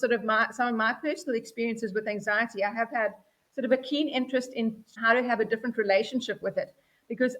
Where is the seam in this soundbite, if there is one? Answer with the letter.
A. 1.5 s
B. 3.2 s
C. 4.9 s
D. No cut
C